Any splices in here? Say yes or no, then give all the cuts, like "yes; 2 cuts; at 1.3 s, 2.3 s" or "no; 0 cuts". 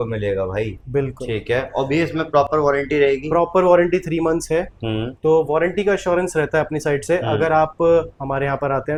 no; 0 cuts